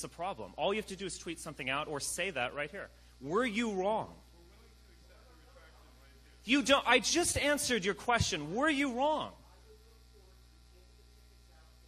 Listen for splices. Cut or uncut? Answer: cut